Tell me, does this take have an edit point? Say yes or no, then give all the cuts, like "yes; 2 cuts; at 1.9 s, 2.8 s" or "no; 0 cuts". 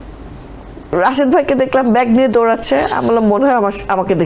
yes; 1 cut; at 0.9 s